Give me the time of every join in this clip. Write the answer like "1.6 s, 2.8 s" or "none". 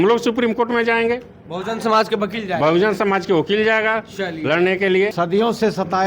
5.1 s